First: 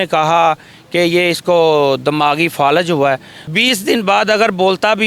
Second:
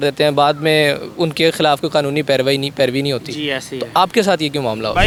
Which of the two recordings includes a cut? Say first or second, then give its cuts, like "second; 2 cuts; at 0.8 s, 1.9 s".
first; 1 cut; at 3.4 s